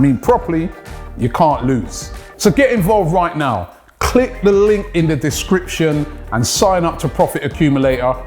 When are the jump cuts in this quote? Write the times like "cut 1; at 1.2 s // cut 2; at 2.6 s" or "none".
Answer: cut 1; at 2.0 s